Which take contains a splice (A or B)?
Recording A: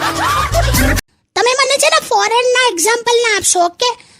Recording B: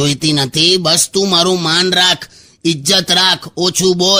A